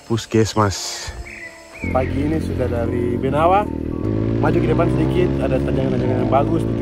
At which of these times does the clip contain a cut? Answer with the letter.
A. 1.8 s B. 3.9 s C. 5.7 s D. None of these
A